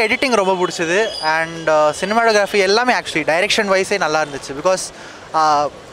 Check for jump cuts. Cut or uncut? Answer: uncut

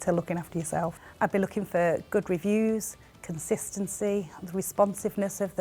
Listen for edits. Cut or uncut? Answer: cut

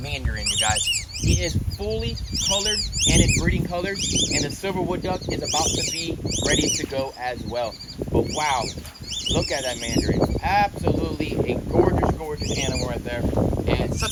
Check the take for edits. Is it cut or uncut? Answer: uncut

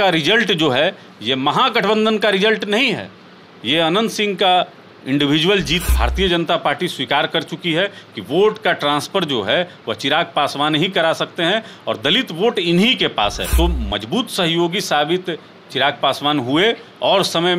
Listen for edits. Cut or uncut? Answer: cut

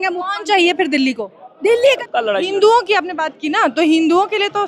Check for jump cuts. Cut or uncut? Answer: cut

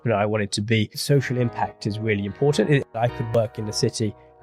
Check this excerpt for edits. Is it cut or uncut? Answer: cut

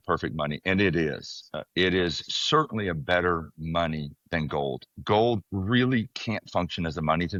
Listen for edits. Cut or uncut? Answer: uncut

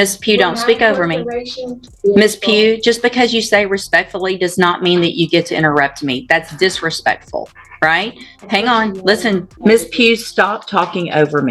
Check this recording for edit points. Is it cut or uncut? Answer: cut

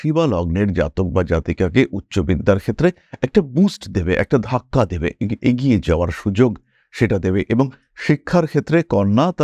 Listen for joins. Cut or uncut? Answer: uncut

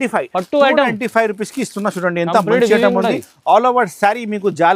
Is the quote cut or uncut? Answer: uncut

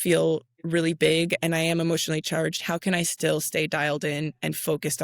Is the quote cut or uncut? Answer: uncut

